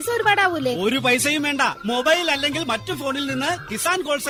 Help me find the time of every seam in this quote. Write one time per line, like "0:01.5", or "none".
none